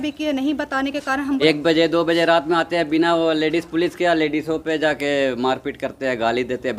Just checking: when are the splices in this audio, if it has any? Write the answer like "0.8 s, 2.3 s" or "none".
1.4 s